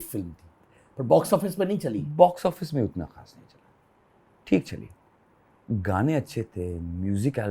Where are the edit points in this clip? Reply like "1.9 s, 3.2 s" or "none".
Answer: none